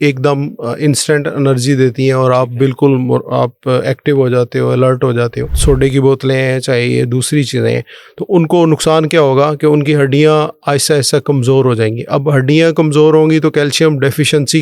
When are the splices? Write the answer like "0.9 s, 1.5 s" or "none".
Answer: 5.5 s